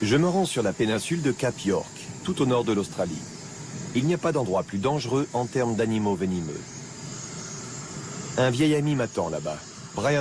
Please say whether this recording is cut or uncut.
uncut